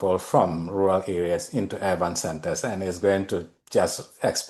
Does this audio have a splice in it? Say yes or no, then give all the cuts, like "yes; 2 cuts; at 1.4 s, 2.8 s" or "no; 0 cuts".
no; 0 cuts